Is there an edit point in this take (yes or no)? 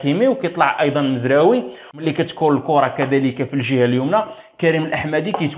yes